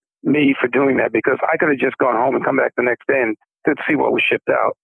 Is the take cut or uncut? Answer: cut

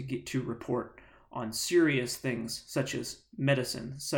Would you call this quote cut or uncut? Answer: uncut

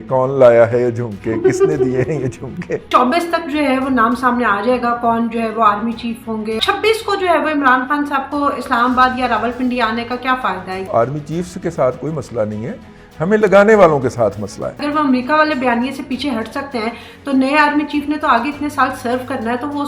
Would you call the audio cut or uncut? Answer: cut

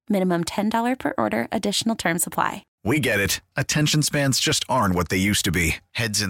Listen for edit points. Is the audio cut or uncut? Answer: cut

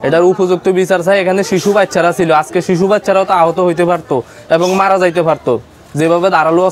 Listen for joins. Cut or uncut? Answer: uncut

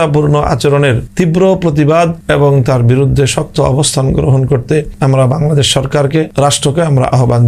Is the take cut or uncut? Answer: cut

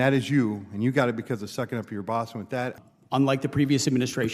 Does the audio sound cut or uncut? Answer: cut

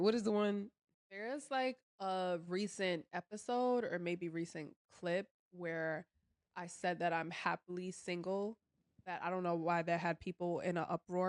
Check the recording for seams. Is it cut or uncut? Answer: uncut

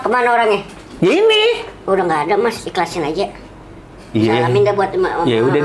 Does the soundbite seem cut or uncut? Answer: uncut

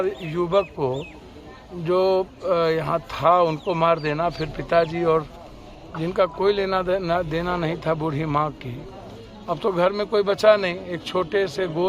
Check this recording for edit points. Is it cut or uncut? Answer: uncut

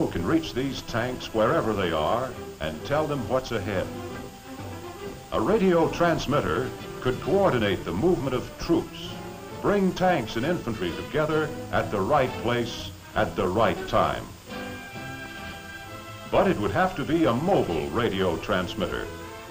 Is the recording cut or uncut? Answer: cut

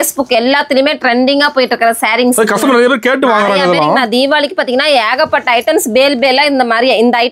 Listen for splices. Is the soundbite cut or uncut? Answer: uncut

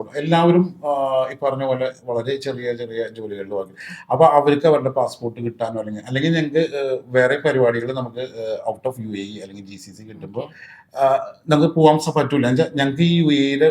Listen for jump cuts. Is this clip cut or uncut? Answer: uncut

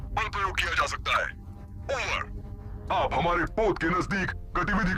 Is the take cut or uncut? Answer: cut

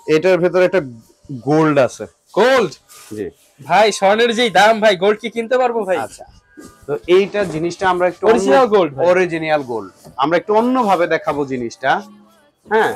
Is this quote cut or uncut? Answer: uncut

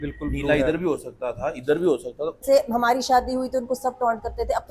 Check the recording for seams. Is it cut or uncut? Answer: cut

